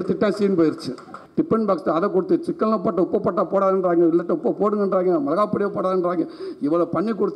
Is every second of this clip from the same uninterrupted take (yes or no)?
no